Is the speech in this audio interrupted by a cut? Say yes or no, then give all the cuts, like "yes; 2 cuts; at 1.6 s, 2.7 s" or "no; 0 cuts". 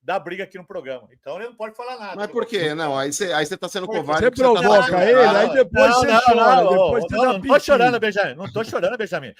no; 0 cuts